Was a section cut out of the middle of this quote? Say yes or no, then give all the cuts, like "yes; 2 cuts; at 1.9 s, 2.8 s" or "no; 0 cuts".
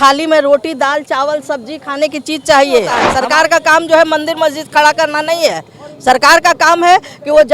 yes; 1 cut; at 3.1 s